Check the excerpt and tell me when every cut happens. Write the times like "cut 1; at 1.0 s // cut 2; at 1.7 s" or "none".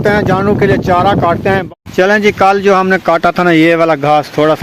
cut 1; at 1.6 s